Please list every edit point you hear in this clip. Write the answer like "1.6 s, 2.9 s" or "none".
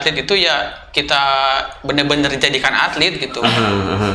none